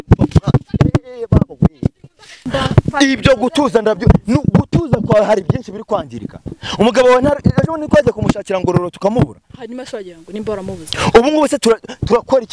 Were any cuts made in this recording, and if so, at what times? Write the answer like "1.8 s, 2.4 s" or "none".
2.4 s